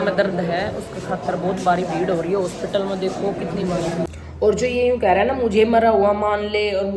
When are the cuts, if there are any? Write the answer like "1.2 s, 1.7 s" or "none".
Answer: 4.1 s

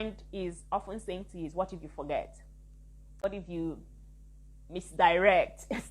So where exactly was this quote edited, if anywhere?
3.2 s

